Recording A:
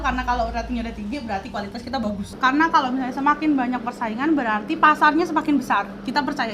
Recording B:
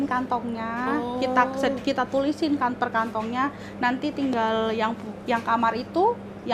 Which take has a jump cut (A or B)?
A